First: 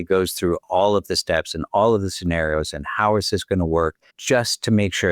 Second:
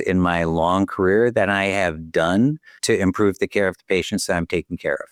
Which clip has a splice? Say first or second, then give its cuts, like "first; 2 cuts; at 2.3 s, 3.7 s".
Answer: first; 1 cut; at 4.1 s